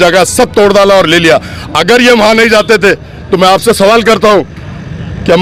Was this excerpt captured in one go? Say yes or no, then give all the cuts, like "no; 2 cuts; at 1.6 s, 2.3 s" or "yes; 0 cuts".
yes; 0 cuts